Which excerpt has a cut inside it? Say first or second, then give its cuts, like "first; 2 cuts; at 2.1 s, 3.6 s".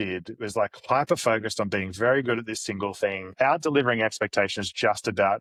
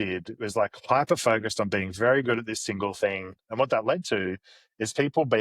second; 1 cut; at 3.2 s